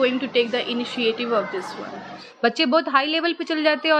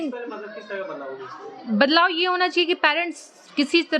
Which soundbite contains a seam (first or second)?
first